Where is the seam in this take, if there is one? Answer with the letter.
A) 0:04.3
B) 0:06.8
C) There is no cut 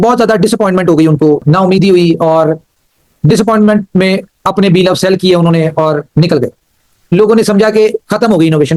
B